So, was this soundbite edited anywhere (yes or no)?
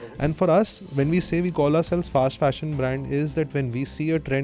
no